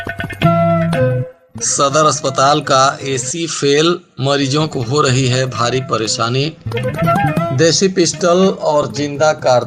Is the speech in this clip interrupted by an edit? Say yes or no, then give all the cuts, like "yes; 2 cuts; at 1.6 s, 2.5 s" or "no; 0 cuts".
yes; 1 cut; at 1.3 s